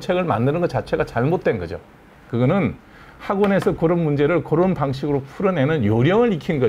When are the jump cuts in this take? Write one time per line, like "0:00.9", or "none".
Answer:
0:02.1